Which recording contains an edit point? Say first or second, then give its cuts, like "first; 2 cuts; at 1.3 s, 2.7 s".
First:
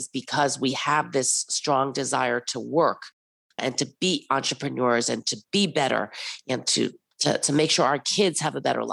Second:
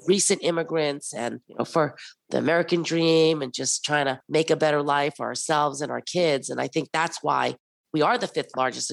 first; 1 cut; at 3.6 s